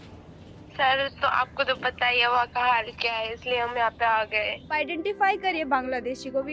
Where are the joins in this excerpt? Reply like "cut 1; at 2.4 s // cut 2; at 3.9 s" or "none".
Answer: cut 1; at 4.7 s